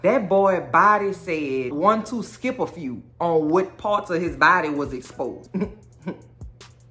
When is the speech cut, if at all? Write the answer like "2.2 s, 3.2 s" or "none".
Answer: 5.4 s